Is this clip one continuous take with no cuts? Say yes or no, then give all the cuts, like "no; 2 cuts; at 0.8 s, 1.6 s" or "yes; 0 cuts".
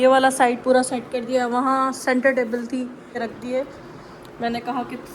no; 1 cut; at 3.3 s